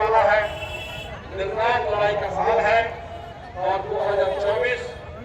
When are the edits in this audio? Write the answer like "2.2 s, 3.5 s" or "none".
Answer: none